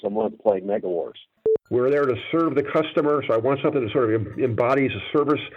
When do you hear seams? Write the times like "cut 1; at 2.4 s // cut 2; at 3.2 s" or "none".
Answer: cut 1; at 1.3 s